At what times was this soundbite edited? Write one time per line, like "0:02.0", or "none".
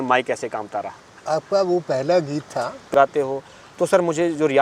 0:02.9